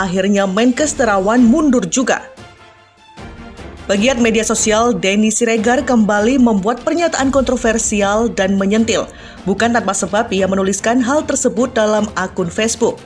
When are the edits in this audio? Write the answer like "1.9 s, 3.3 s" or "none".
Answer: 2.2 s, 3.6 s